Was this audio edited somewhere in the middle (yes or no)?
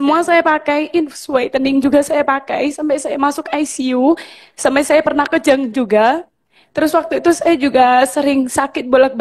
no